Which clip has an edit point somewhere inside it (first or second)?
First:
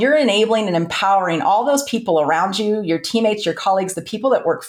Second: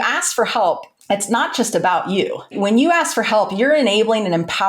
second